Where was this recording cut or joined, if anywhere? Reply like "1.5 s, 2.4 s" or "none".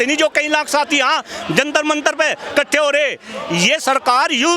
none